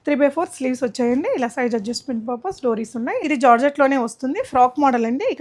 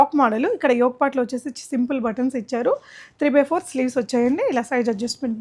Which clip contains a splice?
first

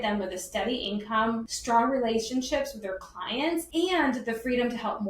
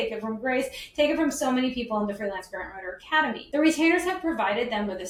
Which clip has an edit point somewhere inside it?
first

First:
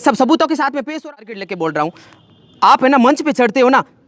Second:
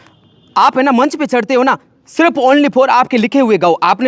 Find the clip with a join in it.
first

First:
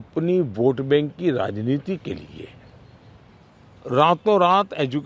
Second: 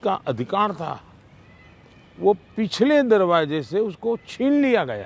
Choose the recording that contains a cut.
first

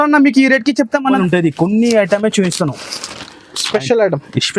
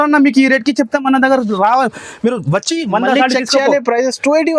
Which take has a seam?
first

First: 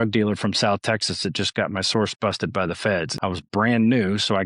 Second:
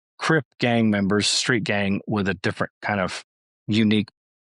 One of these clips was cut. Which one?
first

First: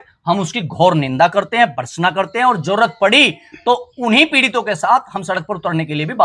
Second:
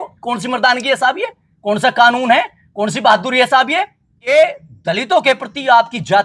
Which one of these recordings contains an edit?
second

